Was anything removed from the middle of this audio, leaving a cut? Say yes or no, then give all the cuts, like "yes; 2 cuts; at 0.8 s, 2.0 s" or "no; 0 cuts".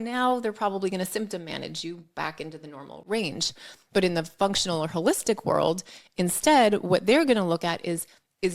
yes; 1 cut; at 2.9 s